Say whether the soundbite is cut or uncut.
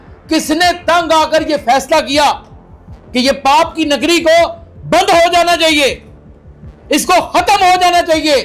uncut